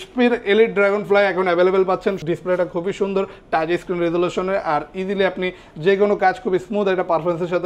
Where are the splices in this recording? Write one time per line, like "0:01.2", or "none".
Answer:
0:02.2

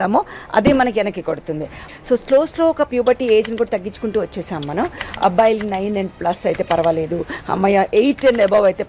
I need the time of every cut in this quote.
0:01.7

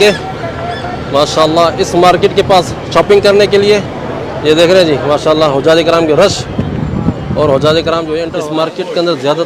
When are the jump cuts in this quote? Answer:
0:08.3

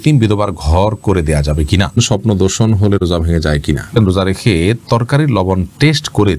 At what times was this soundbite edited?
0:02.0
0:04.0

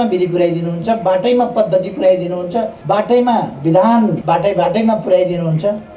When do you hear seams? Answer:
0:02.8
0:04.2

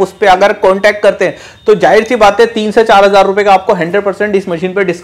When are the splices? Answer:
none

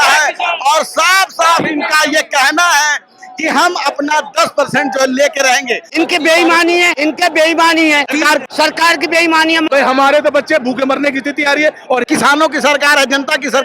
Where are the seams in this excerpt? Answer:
0:05.8
0:06.9
0:08.3
0:09.7
0:12.0

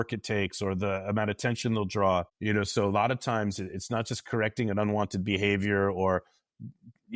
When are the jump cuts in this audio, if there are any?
0:02.3

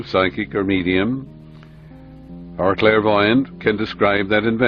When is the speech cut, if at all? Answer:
0:03.2

